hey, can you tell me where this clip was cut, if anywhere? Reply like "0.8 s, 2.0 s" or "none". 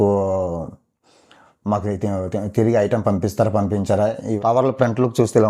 4.2 s

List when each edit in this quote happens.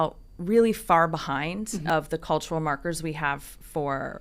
1.8 s

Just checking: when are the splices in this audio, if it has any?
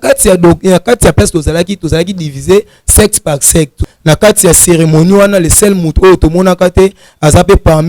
3.8 s

